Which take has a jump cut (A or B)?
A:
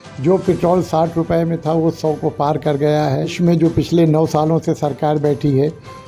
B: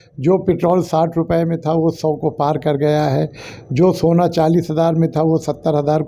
A